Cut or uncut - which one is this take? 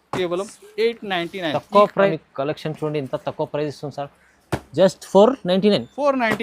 cut